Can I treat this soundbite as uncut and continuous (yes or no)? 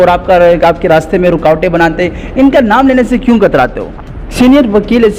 no